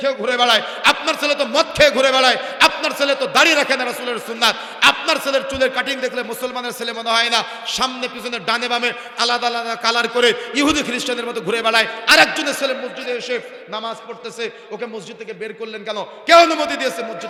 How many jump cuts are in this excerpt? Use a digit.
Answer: 0